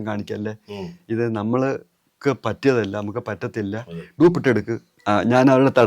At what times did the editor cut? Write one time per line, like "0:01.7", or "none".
0:04.8